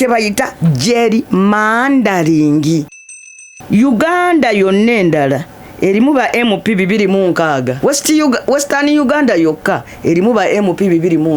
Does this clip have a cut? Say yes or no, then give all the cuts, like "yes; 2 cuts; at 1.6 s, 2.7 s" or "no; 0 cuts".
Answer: yes; 2 cuts; at 3.2 s, 7.7 s